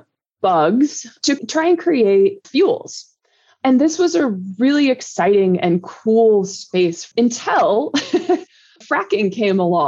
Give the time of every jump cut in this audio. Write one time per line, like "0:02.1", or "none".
0:01.1
0:07.1

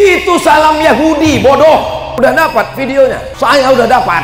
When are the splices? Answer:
0:02.1
0:03.3

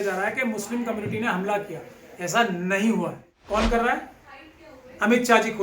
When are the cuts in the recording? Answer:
0:03.3

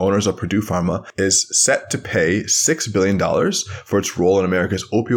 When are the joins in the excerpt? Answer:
0:01.1

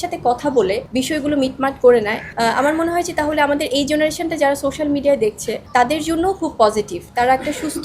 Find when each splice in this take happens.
0:00.8
0:02.2
0:05.5

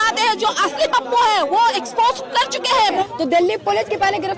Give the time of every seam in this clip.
0:03.1

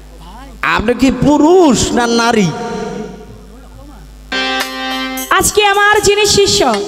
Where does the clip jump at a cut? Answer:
0:04.3

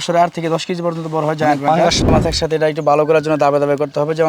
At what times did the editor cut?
0:02.1

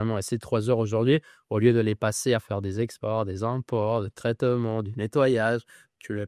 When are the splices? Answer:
none

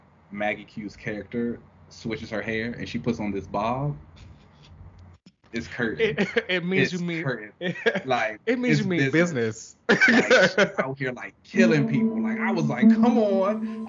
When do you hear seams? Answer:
none

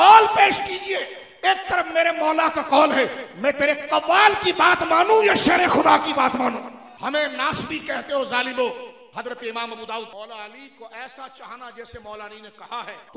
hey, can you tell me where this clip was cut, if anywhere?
0:06.8

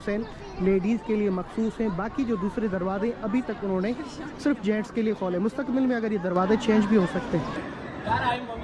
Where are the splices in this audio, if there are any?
0:07.5

